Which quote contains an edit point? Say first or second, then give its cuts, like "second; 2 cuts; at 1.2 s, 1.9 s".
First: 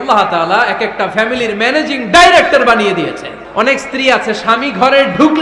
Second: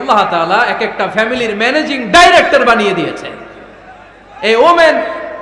first; 1 cut; at 3.3 s